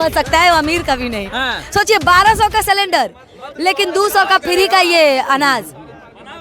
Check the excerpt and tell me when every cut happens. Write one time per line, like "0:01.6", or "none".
none